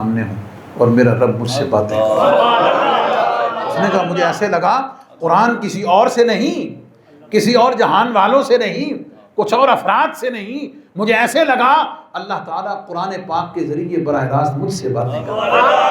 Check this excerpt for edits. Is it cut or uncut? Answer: uncut